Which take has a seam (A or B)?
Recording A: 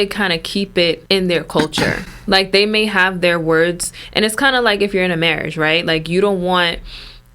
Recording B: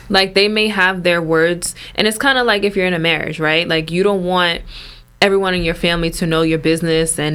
A